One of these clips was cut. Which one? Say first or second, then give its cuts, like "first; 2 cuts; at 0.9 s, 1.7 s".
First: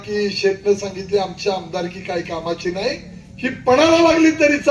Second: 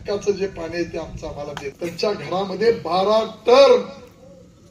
second; 1 cut; at 1.8 s